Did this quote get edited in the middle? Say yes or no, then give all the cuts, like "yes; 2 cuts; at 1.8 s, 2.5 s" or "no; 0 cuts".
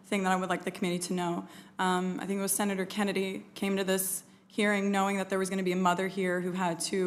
yes; 1 cut; at 3.7 s